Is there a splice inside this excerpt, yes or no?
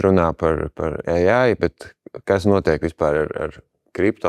no